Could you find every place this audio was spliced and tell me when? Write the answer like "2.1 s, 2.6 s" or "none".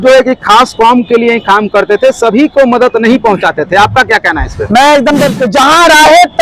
5.3 s